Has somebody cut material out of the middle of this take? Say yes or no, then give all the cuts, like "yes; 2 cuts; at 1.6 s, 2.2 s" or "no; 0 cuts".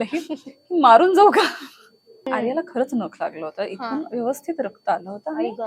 yes; 1 cut; at 2.3 s